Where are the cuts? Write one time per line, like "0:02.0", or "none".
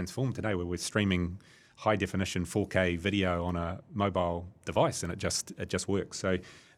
none